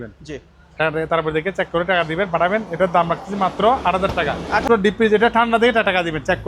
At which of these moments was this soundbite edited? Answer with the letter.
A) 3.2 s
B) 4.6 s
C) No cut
B